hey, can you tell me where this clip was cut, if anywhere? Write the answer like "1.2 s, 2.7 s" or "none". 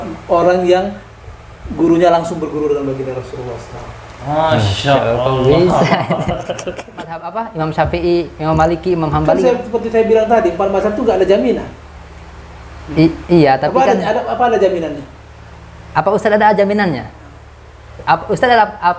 7.3 s

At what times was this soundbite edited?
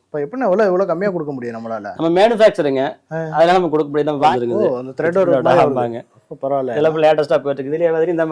4.3 s

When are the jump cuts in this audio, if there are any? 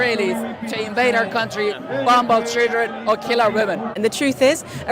3.9 s

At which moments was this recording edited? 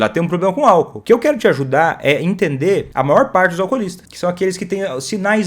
0.9 s, 2.9 s, 4.0 s

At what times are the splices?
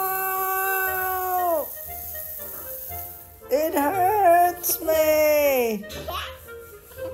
1.7 s, 3.5 s

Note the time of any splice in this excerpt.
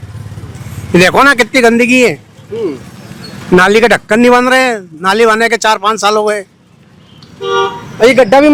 none

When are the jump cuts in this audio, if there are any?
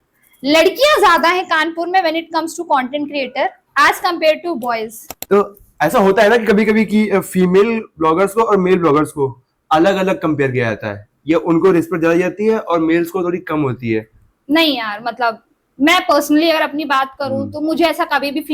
5.2 s

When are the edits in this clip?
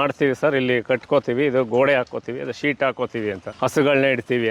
3.5 s

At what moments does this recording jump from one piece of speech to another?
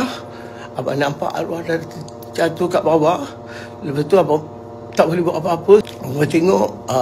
5.9 s

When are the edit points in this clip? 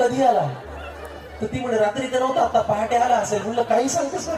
none

